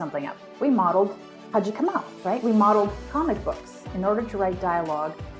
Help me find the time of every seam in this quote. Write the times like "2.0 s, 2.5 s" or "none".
3.9 s